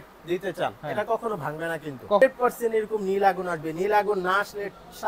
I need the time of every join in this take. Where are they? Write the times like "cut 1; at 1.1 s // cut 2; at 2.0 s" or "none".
cut 1; at 2.2 s